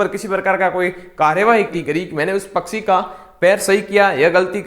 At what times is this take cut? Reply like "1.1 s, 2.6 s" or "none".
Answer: 1.7 s